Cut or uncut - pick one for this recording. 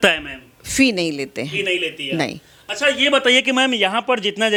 uncut